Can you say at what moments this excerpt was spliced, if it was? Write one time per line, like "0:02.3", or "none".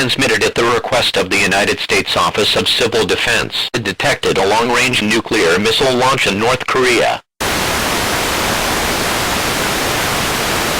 none